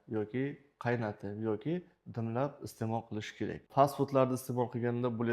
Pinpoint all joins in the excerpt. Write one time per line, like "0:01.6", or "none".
0:03.7